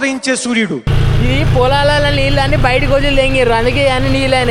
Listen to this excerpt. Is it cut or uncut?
cut